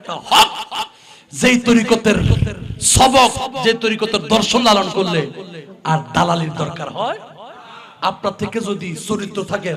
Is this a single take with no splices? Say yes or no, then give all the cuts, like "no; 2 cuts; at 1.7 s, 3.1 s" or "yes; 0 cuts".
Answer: yes; 0 cuts